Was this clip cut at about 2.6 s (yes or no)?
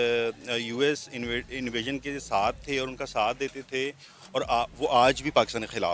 no